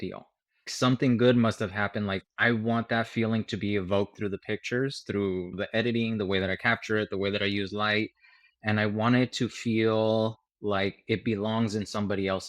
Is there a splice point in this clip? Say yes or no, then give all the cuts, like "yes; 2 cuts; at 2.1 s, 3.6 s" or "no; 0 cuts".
no; 0 cuts